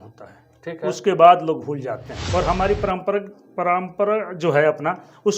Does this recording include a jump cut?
yes; 1 cut; at 2.2 s

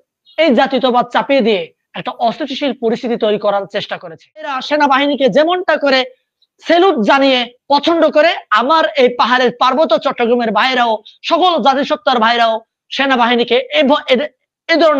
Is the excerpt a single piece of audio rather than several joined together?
no; 1 cut; at 4.6 s

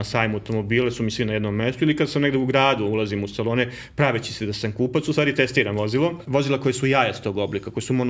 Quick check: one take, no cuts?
no; 1 cut; at 6.2 s

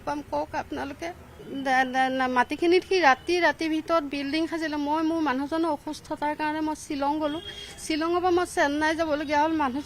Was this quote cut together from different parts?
yes; 1 cut; at 1.3 s

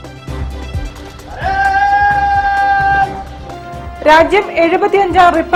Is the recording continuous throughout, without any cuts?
yes; 0 cuts

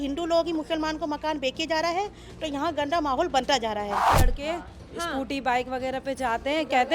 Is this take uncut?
no; 1 cut; at 4.0 s

